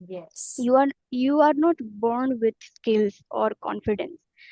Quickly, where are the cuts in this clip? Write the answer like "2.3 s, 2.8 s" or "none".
none